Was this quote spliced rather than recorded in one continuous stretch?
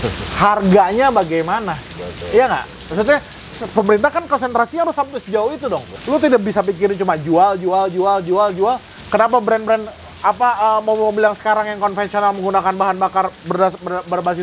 yes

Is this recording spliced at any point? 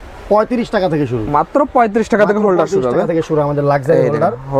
no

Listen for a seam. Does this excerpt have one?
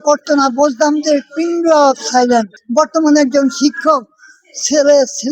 yes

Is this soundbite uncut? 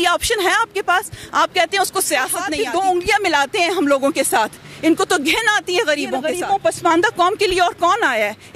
no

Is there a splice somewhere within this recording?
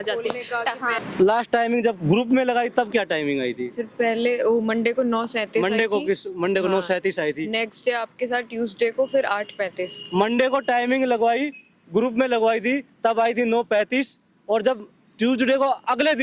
yes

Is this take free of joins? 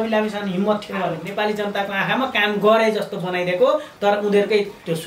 no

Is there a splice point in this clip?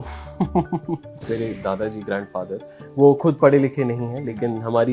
yes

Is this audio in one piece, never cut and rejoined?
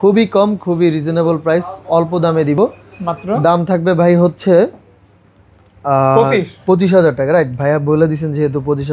yes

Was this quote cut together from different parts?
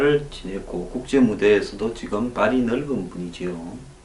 yes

